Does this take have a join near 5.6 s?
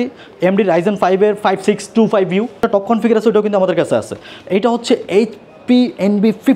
no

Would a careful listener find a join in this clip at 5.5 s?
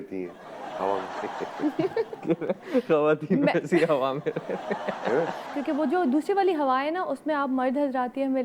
yes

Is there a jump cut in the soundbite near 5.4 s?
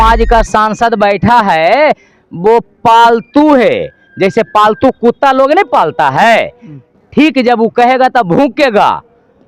no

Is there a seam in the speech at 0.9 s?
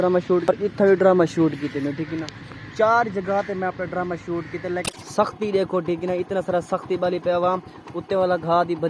yes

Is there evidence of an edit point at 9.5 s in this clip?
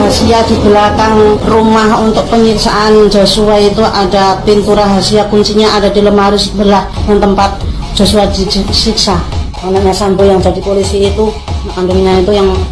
no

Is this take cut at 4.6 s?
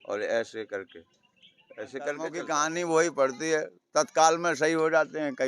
no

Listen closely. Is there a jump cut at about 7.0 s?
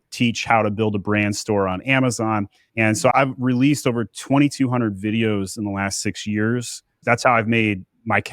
yes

